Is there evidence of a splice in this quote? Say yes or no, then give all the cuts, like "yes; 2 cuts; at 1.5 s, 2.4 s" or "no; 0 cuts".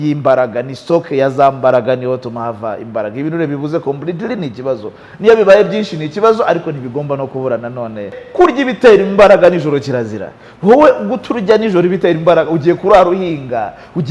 yes; 1 cut; at 8.2 s